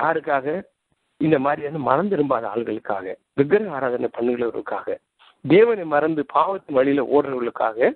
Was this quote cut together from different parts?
no; 0 cuts

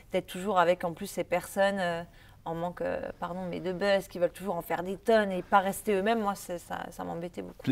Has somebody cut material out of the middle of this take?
no; 0 cuts

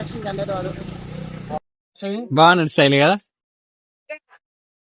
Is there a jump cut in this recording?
no; 0 cuts

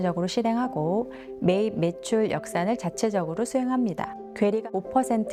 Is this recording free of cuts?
yes; 0 cuts

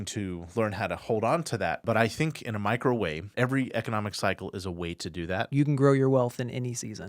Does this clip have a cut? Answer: yes; 3 cuts; at 1.8 s, 3.3 s, 5.5 s

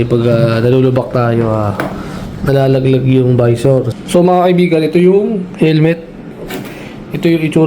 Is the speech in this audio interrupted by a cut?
yes; 1 cut; at 3.9 s

